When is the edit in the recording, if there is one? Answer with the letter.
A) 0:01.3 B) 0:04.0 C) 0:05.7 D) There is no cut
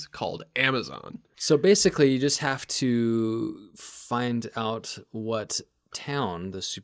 A